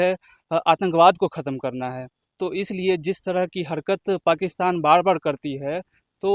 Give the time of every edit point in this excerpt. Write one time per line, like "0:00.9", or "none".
none